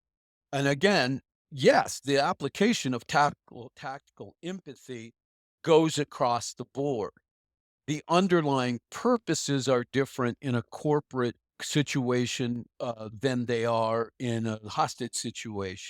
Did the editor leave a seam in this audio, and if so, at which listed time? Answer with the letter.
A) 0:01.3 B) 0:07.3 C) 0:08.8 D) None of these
D